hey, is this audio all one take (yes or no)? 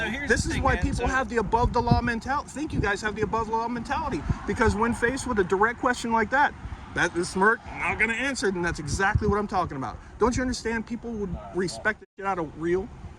yes